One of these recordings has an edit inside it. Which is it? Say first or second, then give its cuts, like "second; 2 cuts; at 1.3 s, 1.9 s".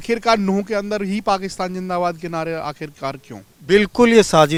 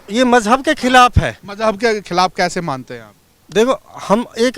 second; 1 cut; at 1.4 s